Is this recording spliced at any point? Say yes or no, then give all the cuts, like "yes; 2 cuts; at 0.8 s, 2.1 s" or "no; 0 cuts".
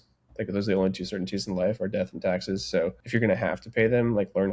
yes; 1 cut; at 3.0 s